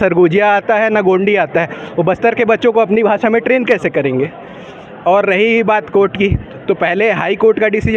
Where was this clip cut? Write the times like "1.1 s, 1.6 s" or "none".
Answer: none